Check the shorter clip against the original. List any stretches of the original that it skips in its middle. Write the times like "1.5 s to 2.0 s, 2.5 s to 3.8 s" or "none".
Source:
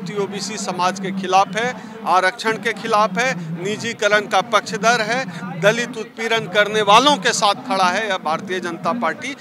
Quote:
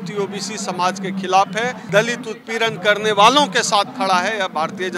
1.8 s to 5.5 s